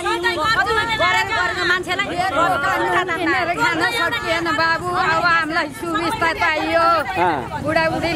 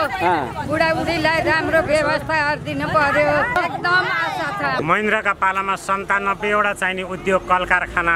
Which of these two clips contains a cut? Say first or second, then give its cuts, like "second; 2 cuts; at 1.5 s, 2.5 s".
second; 2 cuts; at 3.6 s, 4.8 s